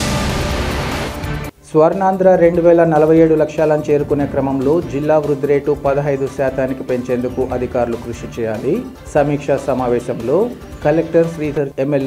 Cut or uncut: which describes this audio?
cut